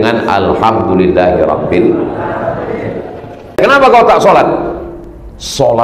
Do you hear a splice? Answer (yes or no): yes